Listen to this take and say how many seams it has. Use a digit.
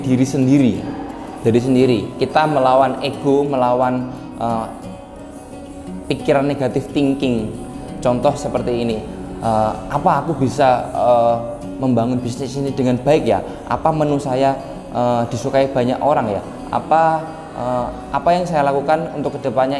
0